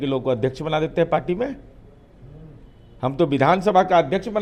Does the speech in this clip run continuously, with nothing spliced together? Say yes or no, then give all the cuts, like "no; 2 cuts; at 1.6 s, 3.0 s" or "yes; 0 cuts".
yes; 0 cuts